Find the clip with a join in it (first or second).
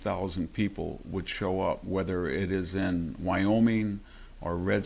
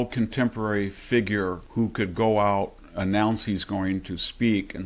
second